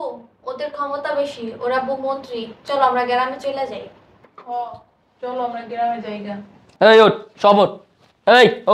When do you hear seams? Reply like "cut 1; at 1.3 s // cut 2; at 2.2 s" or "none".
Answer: none